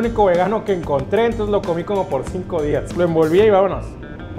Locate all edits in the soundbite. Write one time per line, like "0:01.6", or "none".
0:02.9

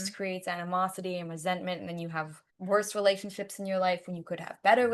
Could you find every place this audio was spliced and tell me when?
none

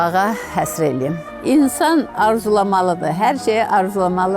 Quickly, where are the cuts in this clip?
0:01.3

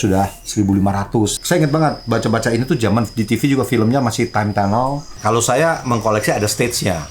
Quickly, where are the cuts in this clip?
0:01.4
0:05.1

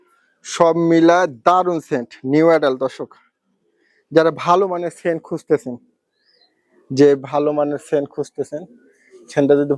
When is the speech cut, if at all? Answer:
none

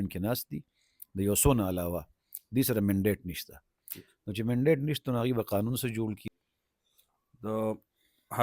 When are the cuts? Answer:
0:06.2

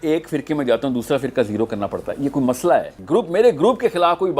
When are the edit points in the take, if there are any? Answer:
0:02.9

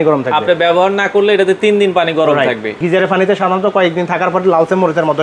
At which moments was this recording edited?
0:02.7

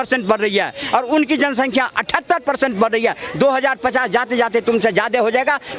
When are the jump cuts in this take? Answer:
none

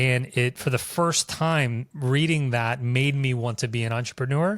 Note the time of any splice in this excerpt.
0:01.9

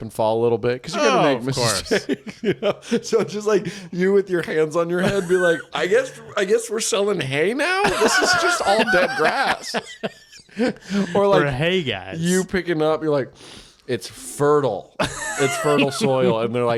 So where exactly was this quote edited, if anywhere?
none

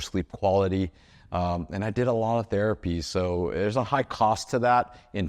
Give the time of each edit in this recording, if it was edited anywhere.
none

